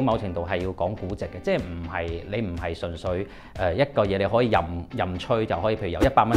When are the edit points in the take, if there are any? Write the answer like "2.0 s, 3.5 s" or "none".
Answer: none